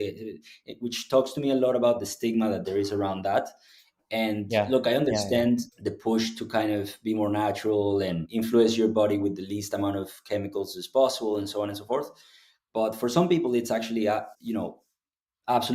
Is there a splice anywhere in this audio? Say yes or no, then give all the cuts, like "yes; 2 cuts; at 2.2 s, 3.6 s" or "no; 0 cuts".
yes; 2 cuts; at 8.3 s, 14.3 s